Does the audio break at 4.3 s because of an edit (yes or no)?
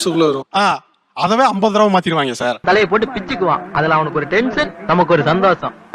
no